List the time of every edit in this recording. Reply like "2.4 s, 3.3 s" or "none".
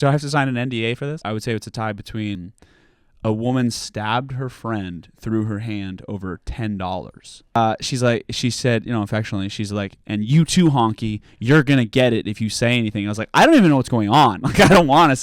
1.2 s, 2.4 s, 7.6 s